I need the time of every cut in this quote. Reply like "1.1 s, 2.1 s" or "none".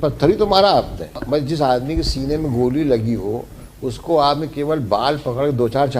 1.1 s